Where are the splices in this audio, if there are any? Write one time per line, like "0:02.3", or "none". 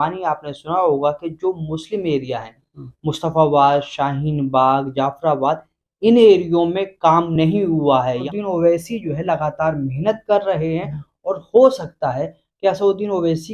0:08.2